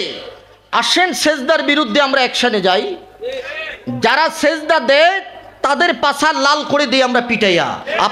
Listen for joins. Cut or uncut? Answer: uncut